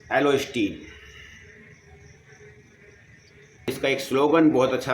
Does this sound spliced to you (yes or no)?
yes